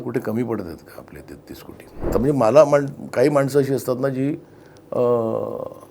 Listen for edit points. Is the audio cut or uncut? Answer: cut